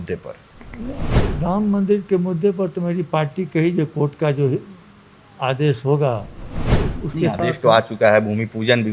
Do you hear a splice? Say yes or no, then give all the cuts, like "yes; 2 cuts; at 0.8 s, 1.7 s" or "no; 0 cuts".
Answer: no; 0 cuts